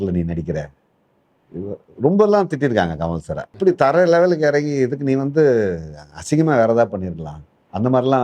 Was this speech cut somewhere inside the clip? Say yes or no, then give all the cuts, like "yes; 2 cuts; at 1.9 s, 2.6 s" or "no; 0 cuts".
yes; 1 cut; at 3.5 s